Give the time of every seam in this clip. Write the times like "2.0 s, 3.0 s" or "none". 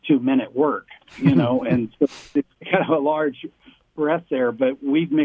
none